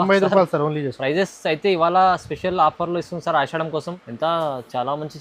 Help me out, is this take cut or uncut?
cut